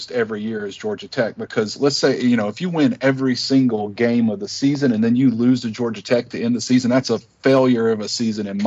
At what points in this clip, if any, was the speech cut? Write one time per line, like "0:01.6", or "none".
none